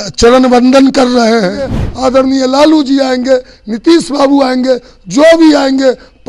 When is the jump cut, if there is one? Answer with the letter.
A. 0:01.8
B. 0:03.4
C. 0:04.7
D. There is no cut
A